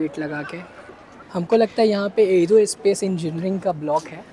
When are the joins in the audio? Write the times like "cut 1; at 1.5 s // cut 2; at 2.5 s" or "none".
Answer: cut 1; at 1.2 s